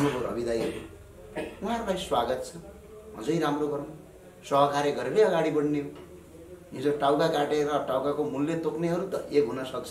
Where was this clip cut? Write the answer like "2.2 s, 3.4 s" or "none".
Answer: none